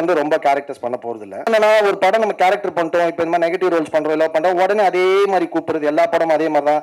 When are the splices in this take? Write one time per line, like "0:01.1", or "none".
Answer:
0:01.5